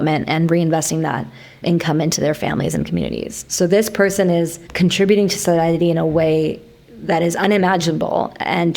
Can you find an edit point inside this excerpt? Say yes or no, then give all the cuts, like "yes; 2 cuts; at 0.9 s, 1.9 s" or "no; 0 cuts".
yes; 1 cut; at 4.6 s